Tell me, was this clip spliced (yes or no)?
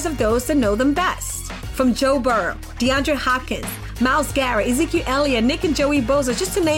no